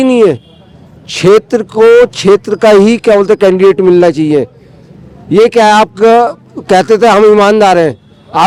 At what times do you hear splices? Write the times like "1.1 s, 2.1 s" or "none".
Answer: none

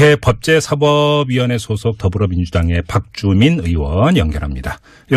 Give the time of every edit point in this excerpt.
3.6 s

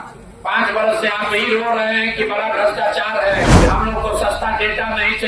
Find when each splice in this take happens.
3.5 s

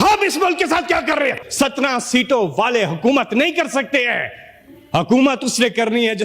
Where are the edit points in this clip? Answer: 1.4 s

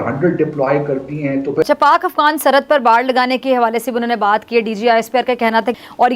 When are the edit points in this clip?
1.7 s

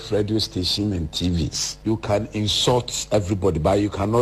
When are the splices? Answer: 1.6 s

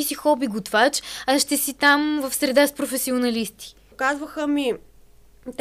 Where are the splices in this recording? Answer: 3.8 s

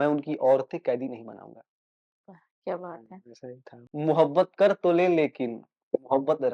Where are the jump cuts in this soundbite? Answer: 3.7 s

